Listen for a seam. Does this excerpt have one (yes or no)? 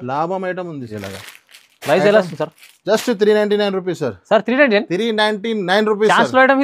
yes